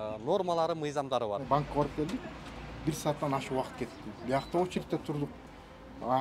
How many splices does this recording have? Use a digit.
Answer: 1